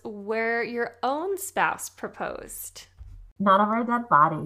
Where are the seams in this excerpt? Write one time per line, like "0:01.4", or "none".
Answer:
0:03.3